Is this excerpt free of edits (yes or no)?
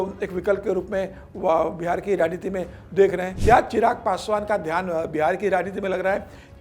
no